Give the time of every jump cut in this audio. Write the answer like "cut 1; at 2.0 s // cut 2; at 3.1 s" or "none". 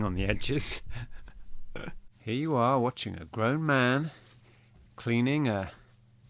cut 1; at 2.0 s